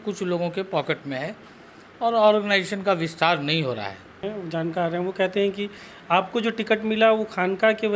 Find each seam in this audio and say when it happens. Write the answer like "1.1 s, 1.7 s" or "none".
4.2 s